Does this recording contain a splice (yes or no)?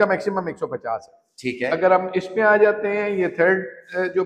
no